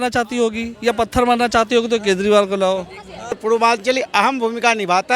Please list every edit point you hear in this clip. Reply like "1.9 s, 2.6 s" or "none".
3.4 s